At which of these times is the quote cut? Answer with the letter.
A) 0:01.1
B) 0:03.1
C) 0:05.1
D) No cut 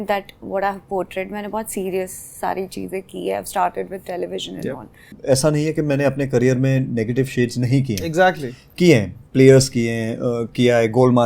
C